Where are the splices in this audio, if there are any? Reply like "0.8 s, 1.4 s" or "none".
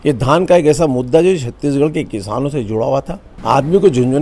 3.2 s